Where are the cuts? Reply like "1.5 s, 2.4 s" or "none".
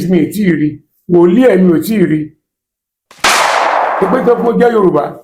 none